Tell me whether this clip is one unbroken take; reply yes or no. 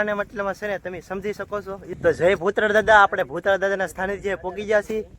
no